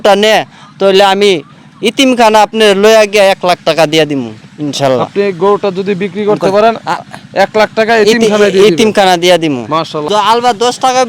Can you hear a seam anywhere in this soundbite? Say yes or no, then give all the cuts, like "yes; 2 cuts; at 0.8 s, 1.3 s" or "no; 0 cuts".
yes; 1 cut; at 10.0 s